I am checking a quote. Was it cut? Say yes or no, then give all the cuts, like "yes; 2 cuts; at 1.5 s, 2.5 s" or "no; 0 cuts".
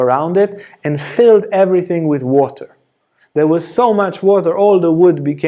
no; 0 cuts